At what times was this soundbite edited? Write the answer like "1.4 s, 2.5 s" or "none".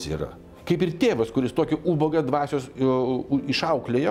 none